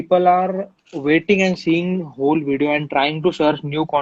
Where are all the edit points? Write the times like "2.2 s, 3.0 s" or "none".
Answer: none